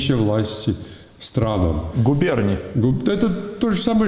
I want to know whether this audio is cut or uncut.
uncut